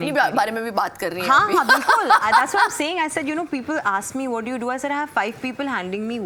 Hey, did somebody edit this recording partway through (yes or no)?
no